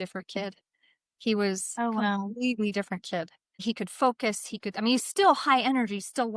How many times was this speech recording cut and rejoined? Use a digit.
1